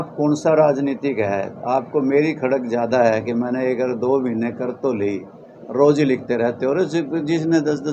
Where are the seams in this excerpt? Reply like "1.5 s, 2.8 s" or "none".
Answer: none